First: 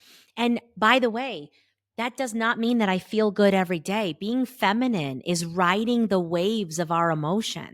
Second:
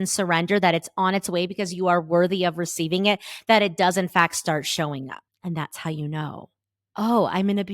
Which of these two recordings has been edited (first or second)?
second